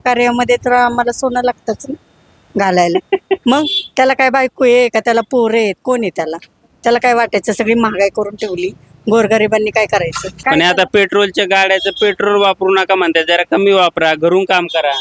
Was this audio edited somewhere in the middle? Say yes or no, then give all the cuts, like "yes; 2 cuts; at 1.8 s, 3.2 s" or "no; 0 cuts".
no; 0 cuts